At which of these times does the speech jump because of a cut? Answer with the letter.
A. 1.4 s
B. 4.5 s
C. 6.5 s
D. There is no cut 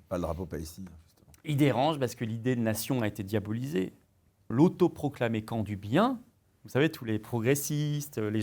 B